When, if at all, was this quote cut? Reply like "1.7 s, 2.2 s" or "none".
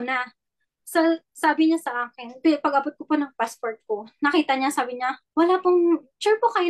5.2 s